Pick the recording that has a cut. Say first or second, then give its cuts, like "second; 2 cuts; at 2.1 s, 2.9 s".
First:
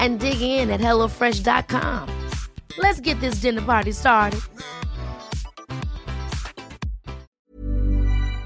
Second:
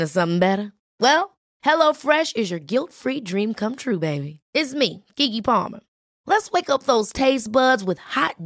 first; 1 cut; at 7.3 s